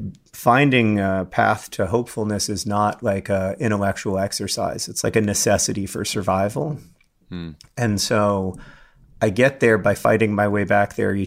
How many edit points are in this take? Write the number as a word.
two